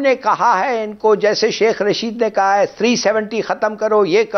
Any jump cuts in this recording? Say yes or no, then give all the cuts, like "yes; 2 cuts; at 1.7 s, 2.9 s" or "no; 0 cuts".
no; 0 cuts